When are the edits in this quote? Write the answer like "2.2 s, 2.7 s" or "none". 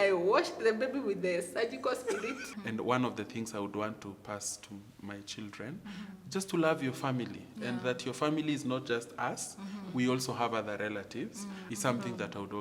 2.5 s, 11.6 s